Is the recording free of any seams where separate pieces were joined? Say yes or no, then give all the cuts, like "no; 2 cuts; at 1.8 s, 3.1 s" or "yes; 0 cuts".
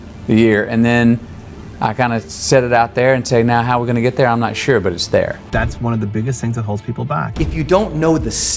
no; 2 cuts; at 5.5 s, 7.3 s